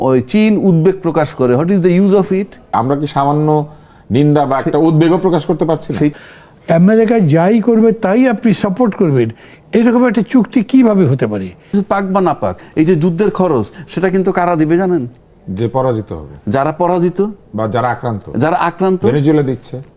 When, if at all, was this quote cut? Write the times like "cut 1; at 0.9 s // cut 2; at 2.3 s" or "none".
cut 1; at 2.7 s // cut 2; at 6.1 s // cut 3; at 11.7 s

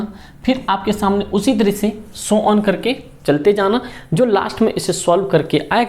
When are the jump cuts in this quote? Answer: none

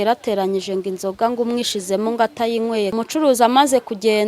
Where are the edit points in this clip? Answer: cut 1; at 2.9 s

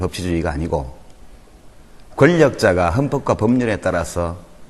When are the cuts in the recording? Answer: cut 1; at 3.5 s

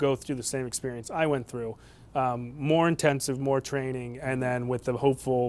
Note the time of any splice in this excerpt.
none

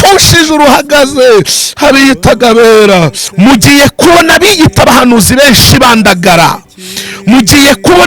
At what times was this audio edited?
cut 1; at 3.2 s

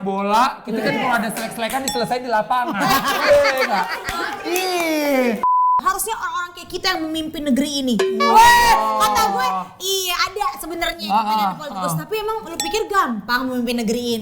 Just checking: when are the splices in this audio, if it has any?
cut 1; at 5.6 s

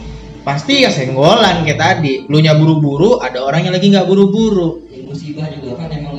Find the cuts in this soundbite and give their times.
none

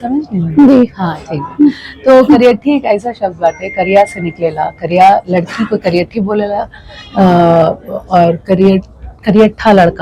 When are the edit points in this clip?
none

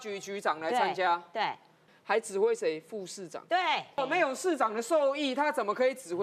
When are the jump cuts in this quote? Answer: cut 1; at 1.8 s // cut 2; at 4.0 s

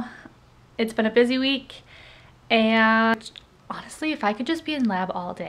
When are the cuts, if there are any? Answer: cut 1; at 3.1 s

